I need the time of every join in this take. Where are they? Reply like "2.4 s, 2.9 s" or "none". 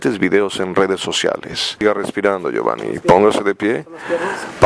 1.8 s